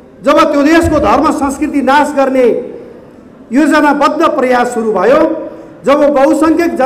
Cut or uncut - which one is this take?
uncut